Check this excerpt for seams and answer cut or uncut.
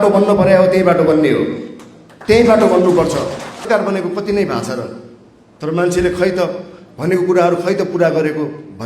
cut